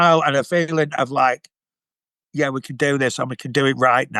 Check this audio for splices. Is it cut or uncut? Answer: uncut